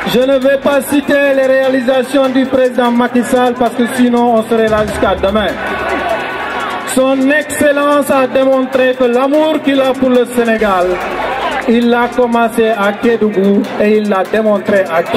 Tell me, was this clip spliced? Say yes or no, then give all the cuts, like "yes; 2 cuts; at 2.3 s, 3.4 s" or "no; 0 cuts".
no; 0 cuts